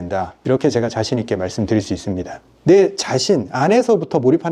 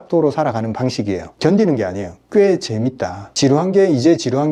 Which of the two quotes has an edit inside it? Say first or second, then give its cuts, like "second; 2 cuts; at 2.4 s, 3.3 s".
first; 1 cut; at 2.5 s